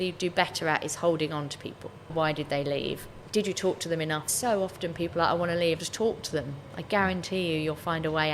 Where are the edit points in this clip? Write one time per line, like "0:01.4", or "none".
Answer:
0:02.1
0:03.2
0:04.3
0:05.8